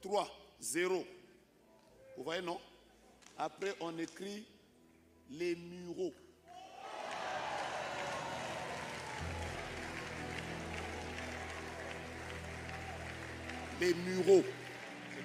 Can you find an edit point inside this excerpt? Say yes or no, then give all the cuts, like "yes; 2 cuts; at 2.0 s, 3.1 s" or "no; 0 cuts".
no; 0 cuts